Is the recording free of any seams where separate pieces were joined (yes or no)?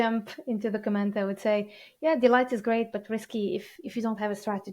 no